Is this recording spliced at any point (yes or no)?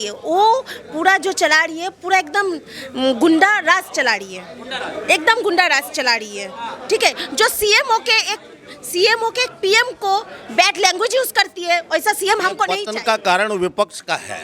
yes